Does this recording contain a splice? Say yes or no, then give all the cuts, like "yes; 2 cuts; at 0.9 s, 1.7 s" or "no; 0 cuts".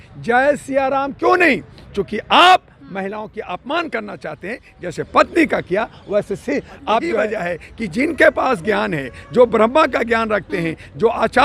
yes; 1 cut; at 7.2 s